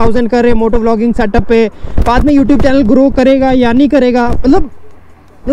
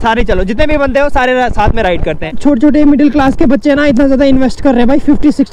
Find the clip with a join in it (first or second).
second